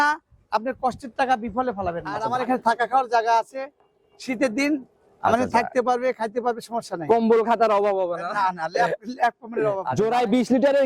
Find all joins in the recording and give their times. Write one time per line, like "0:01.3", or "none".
0:02.2
0:09.9